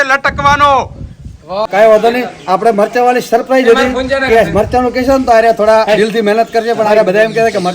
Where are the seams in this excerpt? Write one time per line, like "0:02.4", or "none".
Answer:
0:01.7